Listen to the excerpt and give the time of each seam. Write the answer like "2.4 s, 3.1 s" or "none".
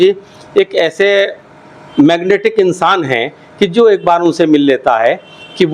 none